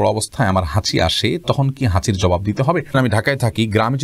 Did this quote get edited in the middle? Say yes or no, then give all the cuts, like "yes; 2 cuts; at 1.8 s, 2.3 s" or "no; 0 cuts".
yes; 1 cut; at 2.9 s